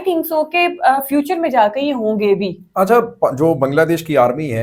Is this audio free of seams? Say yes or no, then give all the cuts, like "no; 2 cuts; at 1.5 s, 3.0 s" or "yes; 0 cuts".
yes; 0 cuts